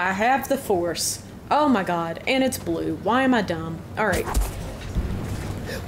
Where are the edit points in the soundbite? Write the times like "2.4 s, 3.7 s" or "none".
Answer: 4.9 s